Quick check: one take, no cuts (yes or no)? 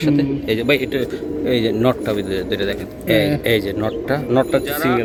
yes